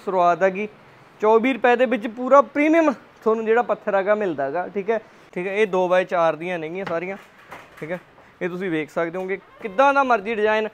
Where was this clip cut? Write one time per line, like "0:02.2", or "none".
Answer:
0:05.2